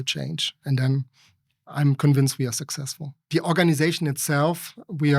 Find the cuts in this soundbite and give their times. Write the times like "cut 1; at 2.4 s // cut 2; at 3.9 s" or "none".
cut 1; at 3.1 s